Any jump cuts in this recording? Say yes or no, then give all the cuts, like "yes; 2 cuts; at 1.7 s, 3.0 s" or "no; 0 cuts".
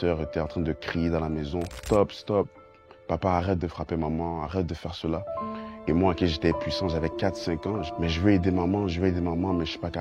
yes; 2 cuts; at 1.8 s, 7.9 s